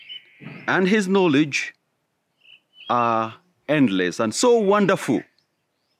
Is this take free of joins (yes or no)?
yes